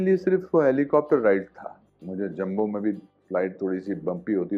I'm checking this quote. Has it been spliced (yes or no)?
yes